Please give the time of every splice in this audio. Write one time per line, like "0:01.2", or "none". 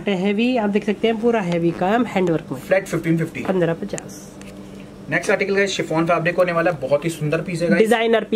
none